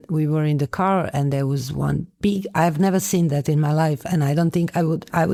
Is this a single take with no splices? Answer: yes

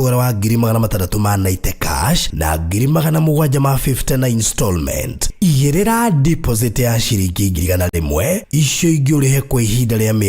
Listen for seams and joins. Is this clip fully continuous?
no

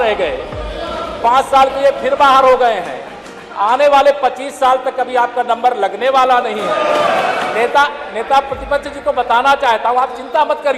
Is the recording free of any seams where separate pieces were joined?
no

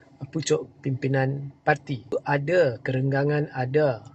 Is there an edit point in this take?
yes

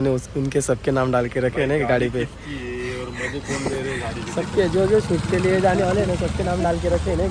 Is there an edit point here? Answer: no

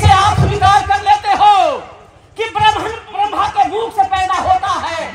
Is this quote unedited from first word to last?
no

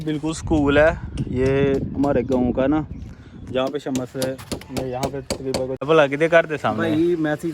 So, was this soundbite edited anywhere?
yes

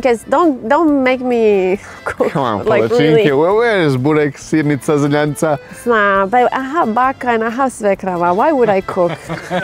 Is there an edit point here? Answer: no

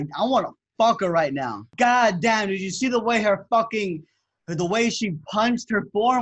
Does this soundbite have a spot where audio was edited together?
yes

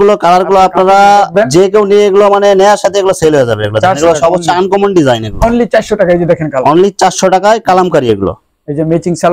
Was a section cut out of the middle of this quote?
no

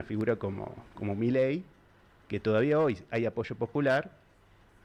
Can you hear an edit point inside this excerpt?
no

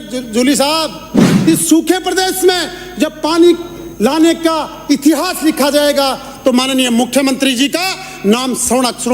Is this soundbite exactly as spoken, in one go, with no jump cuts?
no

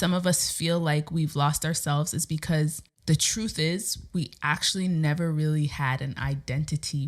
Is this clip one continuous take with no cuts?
no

